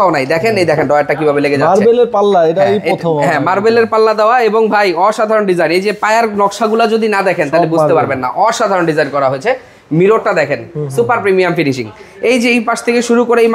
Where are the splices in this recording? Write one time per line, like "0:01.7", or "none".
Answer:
none